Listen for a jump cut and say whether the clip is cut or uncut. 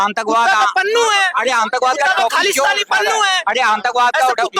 uncut